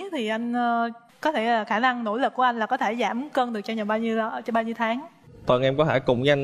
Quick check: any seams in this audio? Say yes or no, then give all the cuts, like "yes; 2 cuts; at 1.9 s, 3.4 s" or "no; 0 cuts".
no; 0 cuts